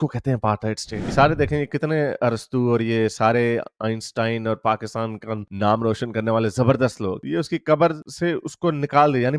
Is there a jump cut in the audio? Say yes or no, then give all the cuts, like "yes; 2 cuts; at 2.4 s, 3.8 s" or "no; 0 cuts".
yes; 1 cut; at 1.0 s